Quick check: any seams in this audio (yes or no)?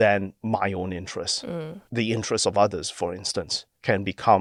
no